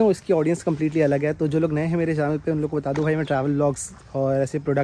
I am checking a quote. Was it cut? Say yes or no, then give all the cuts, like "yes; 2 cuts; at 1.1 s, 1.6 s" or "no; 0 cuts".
no; 0 cuts